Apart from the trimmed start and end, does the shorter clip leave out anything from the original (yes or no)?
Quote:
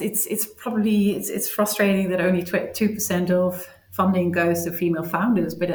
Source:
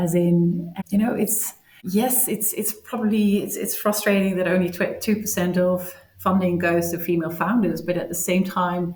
no